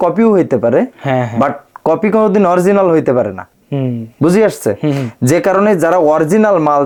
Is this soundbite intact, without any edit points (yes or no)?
yes